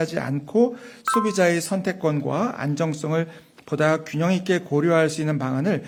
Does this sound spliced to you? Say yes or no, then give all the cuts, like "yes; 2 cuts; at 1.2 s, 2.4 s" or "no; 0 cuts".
no; 0 cuts